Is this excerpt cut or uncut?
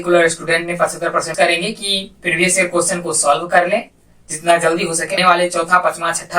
cut